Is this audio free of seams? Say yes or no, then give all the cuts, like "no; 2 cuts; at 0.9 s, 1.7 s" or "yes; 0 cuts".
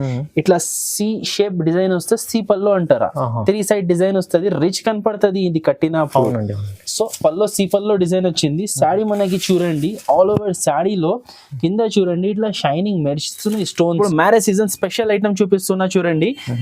no; 1 cut; at 14.0 s